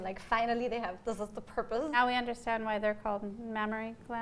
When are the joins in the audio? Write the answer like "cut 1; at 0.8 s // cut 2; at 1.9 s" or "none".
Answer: cut 1; at 1.9 s